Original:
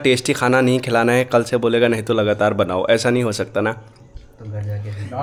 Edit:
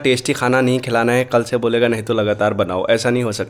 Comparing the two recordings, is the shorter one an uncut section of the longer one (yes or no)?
yes